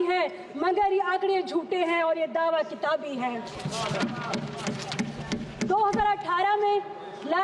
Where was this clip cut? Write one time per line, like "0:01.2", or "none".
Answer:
none